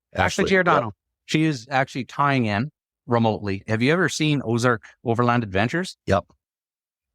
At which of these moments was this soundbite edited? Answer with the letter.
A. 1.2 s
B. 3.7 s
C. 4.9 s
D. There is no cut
B